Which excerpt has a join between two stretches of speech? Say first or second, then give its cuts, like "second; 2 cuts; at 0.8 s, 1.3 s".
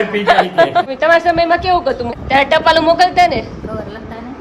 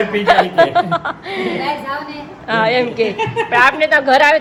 first; 2 cuts; at 0.9 s, 2.1 s